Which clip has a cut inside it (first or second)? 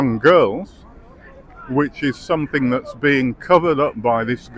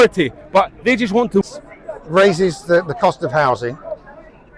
second